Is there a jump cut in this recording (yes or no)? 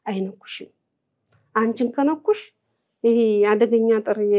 no